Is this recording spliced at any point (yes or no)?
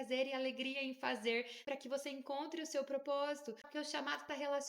yes